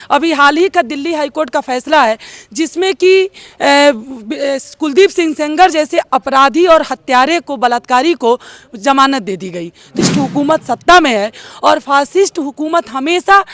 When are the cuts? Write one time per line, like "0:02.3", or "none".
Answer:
0:10.0